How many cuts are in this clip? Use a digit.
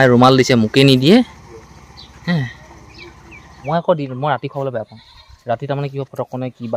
1